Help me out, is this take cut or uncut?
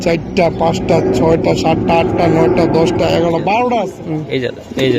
cut